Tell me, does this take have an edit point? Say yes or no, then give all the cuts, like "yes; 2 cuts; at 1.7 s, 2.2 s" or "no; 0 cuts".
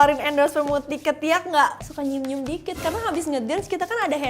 yes; 1 cut; at 1.8 s